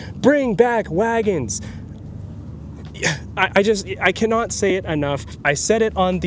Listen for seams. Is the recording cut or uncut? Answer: uncut